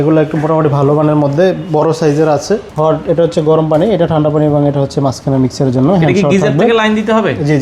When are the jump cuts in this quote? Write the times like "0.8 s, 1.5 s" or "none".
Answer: 2.7 s